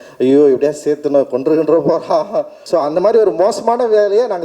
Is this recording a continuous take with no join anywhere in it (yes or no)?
no